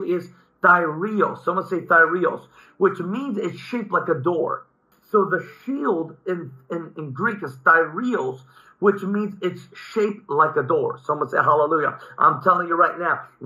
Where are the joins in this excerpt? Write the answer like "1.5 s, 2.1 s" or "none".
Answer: 4.9 s